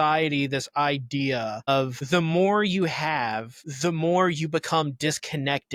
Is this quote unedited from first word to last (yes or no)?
yes